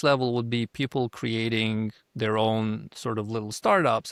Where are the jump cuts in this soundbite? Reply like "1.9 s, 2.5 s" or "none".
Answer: none